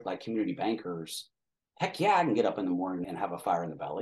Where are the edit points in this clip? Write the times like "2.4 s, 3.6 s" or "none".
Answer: 3.1 s